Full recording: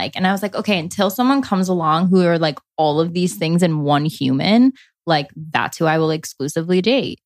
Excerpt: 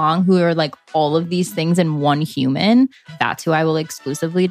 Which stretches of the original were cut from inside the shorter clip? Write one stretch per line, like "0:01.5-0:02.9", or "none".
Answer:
0:04.9-0:05.4